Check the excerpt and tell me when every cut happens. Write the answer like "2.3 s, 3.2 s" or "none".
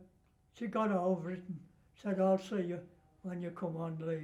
none